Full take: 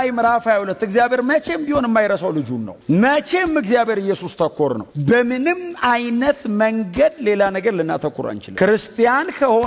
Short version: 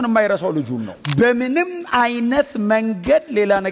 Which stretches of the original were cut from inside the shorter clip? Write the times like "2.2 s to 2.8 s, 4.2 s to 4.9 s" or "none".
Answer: 2.7 s to 4.8 s